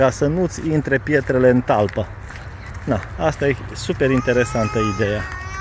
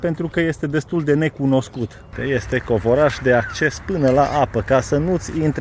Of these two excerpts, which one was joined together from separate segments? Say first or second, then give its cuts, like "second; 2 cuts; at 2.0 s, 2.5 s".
second; 1 cut; at 2.2 s